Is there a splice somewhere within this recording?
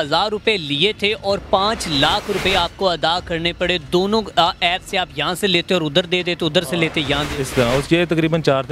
no; 0 cuts

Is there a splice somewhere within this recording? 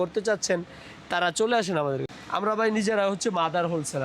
yes; 1 cut; at 2.1 s

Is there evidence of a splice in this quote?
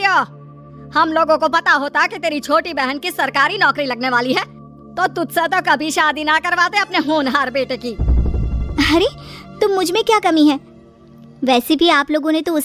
no; 0 cuts

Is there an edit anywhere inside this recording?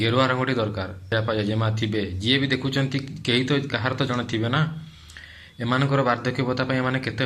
yes; 1 cut; at 1.1 s

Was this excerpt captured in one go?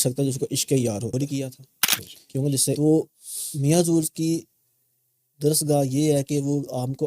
no; 1 cut; at 2.8 s

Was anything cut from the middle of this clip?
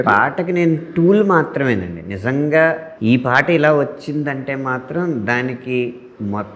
yes; 1 cut; at 2.9 s

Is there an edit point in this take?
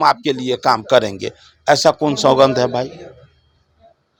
no; 0 cuts

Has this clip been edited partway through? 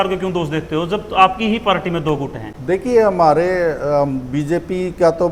no; 0 cuts

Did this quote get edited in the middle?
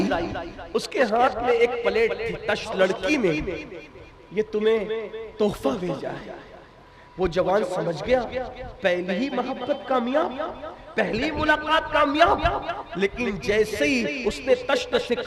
yes; 1 cut; at 2.7 s

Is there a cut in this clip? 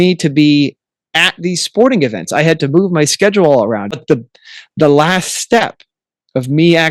yes; 1 cut; at 4.0 s

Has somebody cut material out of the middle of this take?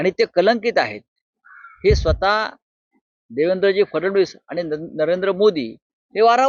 no; 0 cuts

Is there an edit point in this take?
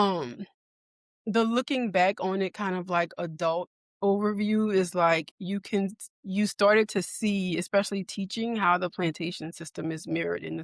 no; 0 cuts

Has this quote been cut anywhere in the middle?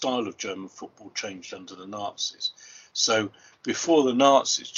no; 0 cuts

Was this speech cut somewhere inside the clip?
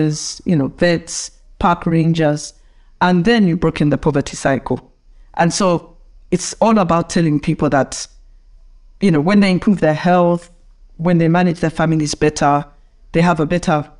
no; 0 cuts

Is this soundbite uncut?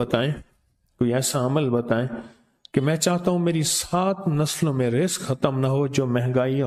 yes; 0 cuts

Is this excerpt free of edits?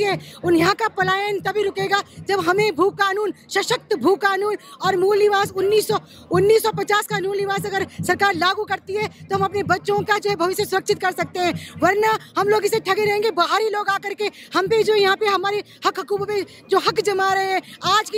yes; 0 cuts

